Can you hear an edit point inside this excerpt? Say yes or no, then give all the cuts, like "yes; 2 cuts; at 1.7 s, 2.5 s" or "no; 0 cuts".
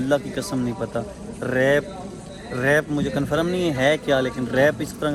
no; 0 cuts